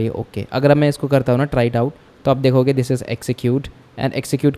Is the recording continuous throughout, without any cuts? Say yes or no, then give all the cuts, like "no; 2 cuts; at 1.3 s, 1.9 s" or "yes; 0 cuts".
yes; 0 cuts